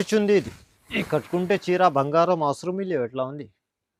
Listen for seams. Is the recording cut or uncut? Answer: uncut